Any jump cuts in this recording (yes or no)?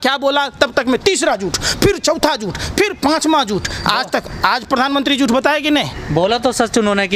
no